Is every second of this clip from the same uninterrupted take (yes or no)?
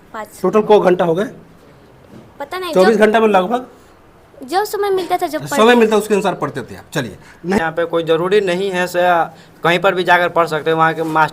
no